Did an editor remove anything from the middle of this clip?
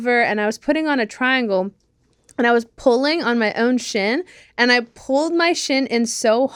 no; 0 cuts

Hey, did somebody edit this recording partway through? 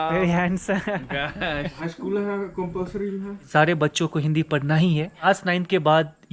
yes; 3 cuts; at 1.7 s, 3.4 s, 5.2 s

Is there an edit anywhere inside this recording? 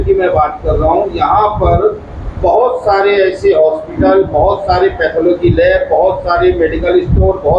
no; 0 cuts

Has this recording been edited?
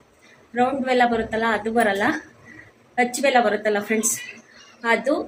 no; 0 cuts

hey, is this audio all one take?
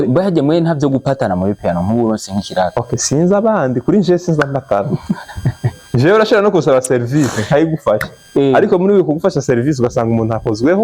yes; 0 cuts

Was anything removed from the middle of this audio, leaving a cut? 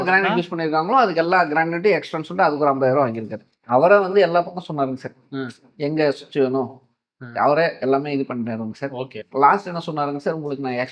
yes; 1 cut; at 3.6 s

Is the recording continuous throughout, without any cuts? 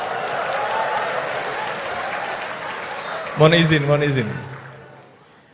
yes; 0 cuts

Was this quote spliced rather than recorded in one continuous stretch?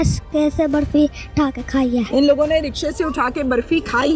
no; 0 cuts

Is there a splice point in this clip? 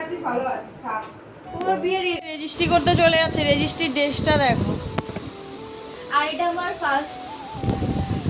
yes; 1 cut; at 2.2 s

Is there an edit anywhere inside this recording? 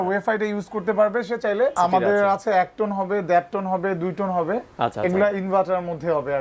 yes; 1 cut; at 1.7 s

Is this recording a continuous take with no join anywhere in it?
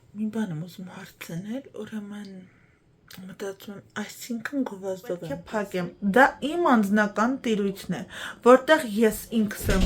no; 1 cut; at 5.4 s

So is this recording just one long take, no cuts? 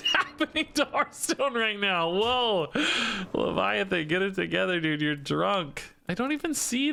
yes; 0 cuts

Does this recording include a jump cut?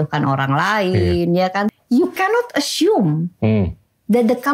yes; 1 cut; at 1.7 s

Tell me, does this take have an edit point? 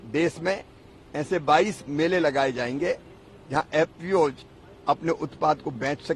no; 0 cuts

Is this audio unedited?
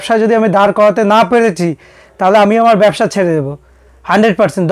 yes; 0 cuts

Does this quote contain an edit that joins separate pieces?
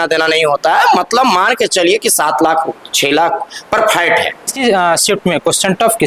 yes; 1 cut; at 4.6 s

